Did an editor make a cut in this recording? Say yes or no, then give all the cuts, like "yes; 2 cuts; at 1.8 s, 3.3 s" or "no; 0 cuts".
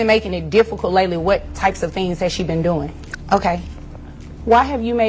yes; 1 cut; at 3.0 s